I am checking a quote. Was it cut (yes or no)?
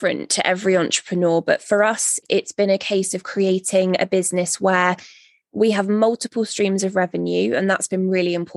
no